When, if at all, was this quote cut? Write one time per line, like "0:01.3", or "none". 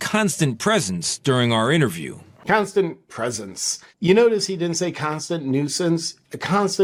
none